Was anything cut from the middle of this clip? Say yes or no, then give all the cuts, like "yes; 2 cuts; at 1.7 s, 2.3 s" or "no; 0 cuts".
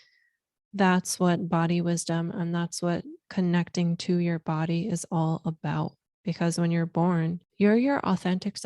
yes; 2 cuts; at 6.1 s, 7.4 s